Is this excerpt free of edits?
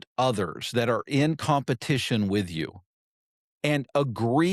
yes; 0 cuts

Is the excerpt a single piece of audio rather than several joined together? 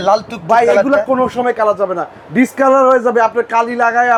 yes; 0 cuts

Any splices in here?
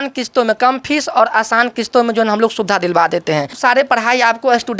yes; 1 cut; at 3.5 s

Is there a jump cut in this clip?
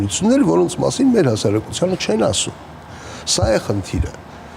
no; 0 cuts

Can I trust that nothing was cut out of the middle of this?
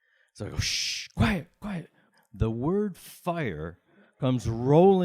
no; 1 cut; at 2.1 s

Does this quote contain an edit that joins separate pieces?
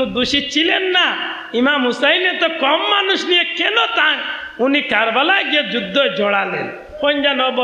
no; 0 cuts

